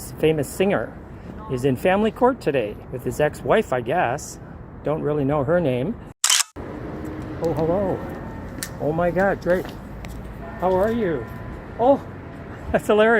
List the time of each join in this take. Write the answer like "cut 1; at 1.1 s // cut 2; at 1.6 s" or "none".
cut 1; at 2.9 s // cut 2; at 6.5 s